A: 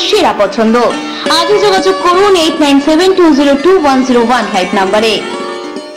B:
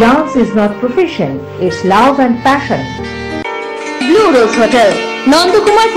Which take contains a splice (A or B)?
B